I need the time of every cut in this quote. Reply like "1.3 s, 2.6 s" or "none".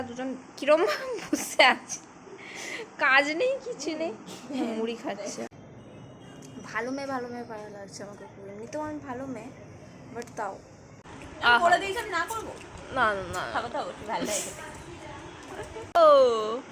5.6 s, 11.1 s, 16.0 s